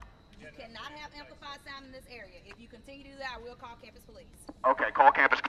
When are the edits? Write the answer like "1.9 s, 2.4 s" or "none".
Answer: none